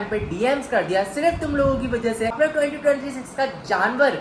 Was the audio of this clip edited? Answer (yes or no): yes